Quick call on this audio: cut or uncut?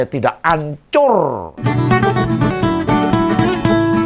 cut